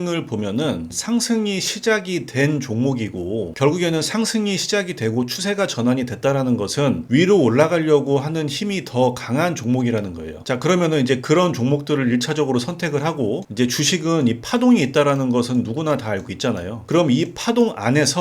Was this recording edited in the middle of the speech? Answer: yes; 1 cut; at 0.9 s

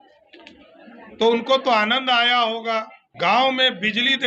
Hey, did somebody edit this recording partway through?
yes; 1 cut; at 3.0 s

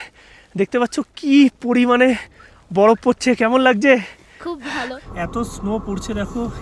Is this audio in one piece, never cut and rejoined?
no; 1 cut; at 5.0 s

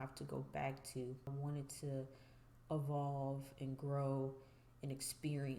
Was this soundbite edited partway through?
yes; 1 cut; at 1.3 s

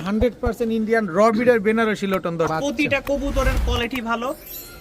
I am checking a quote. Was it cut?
yes; 1 cut; at 2.5 s

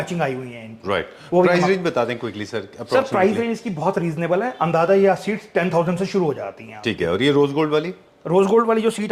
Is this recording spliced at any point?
no; 0 cuts

